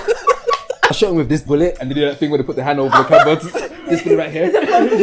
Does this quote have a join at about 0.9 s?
yes; 1 cut; at 0.9 s

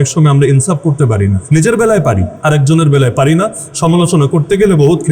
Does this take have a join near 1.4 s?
yes; 2 cuts; at 1.4 s, 2.3 s

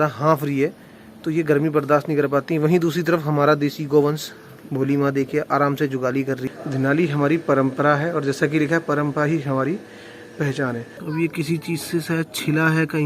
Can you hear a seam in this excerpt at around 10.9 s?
yes; 2 cuts; at 6.4 s, 10.9 s

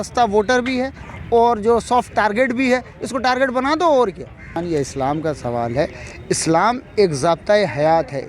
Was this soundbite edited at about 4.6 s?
yes; 1 cut; at 4.6 s

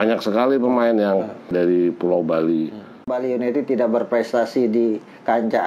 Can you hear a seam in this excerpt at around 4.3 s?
no; 2 cuts; at 1.5 s, 3.1 s

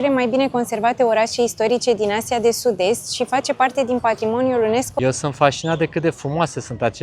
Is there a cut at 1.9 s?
no; 1 cut; at 4.9 s

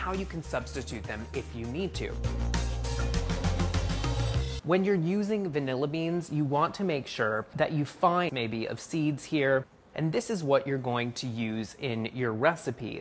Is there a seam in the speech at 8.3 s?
no; 0 cuts

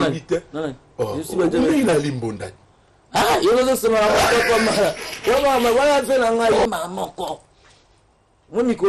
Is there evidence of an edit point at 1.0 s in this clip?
no; 1 cut; at 6.7 s

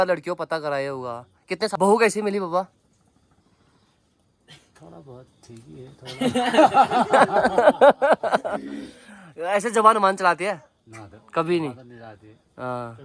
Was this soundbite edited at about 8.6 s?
no; 1 cut; at 1.7 s

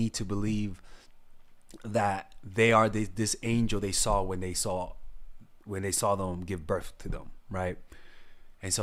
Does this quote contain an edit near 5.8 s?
no; 0 cuts

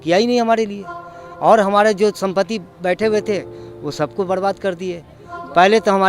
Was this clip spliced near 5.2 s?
no; 0 cuts

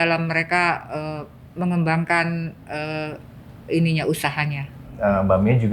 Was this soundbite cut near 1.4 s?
no; 1 cut; at 4.8 s

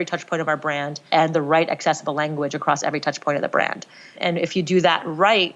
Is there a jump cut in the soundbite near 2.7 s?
no; 2 cuts; at 1.0 s, 4.1 s

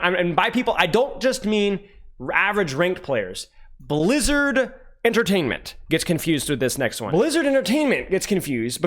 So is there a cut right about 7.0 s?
yes; 1 cut; at 7.0 s

